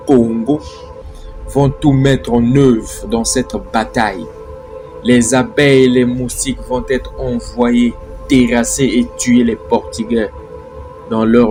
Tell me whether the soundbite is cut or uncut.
uncut